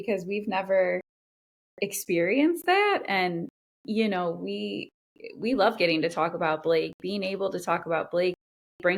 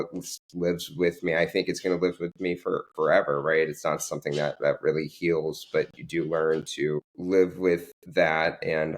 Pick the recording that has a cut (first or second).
second